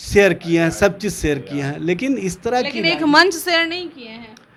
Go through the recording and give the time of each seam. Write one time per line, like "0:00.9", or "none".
none